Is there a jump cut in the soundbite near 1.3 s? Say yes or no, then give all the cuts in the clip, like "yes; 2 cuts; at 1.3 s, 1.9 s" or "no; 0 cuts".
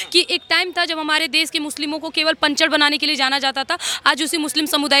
no; 0 cuts